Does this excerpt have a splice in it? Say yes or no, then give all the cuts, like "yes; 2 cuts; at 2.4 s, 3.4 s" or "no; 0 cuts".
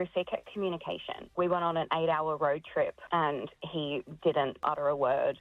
yes; 2 cuts; at 1.3 s, 4.6 s